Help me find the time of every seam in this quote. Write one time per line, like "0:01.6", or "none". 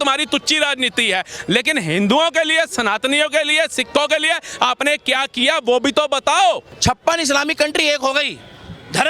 0:06.7